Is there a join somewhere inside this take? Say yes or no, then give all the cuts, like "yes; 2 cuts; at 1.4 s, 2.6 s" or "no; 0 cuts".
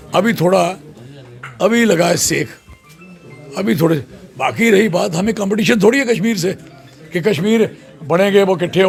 no; 0 cuts